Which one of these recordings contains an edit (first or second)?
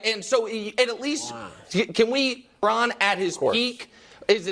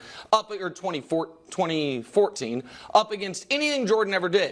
first